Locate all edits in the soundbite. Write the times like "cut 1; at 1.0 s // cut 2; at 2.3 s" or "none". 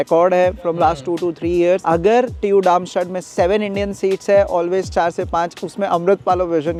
none